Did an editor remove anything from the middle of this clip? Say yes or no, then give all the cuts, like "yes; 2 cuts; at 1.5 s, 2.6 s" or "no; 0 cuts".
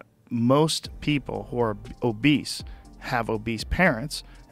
no; 0 cuts